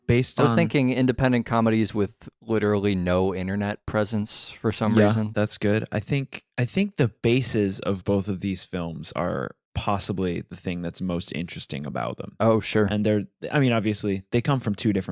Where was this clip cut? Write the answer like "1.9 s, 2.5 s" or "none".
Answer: none